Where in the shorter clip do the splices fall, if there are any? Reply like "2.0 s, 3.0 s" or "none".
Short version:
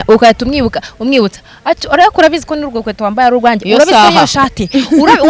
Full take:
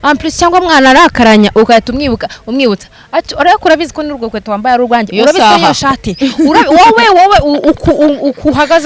none